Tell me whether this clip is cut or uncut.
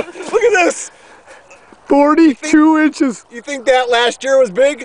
uncut